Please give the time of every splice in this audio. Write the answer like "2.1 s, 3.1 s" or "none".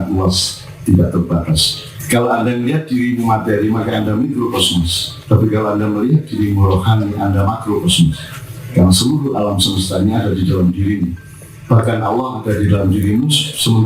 1.9 s